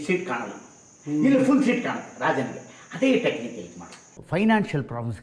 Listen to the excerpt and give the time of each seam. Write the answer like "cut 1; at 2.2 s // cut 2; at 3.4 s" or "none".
cut 1; at 4.1 s